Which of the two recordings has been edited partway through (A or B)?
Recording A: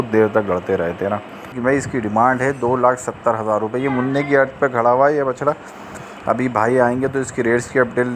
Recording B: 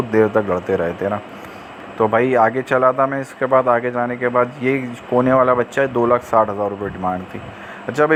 A